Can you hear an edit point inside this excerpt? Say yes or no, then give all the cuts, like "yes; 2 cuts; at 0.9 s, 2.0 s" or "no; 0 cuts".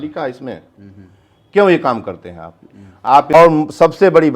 yes; 1 cut; at 3.3 s